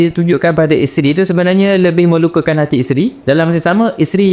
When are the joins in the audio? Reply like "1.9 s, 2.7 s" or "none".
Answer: 3.2 s